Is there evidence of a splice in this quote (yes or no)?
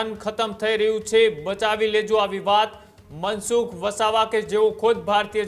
no